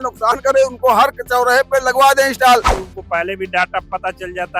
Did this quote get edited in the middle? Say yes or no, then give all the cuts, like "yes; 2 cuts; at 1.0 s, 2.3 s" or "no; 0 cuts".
yes; 1 cut; at 2.8 s